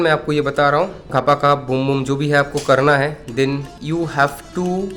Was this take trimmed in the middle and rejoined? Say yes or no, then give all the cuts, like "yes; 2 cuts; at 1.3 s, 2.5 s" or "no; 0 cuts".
yes; 1 cut; at 1.0 s